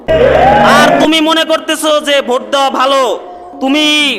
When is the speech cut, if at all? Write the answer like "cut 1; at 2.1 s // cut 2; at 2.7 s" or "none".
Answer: cut 1; at 1.0 s